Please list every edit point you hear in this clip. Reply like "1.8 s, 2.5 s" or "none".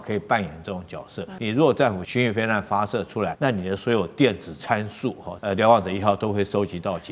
1.3 s, 2.0 s, 3.3 s, 5.3 s